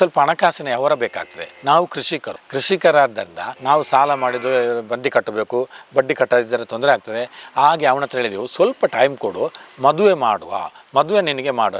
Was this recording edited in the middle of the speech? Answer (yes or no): no